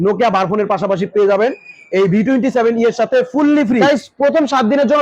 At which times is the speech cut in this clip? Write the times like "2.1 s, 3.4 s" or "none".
3.8 s